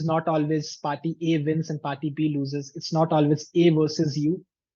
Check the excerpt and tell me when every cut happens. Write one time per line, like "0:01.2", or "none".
none